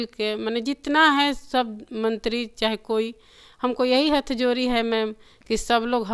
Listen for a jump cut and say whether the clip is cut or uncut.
uncut